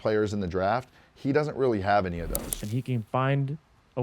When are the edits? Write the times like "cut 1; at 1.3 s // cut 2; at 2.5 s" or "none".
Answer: cut 1; at 2.6 s